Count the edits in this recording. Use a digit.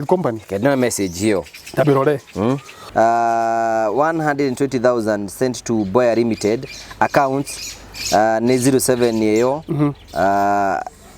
1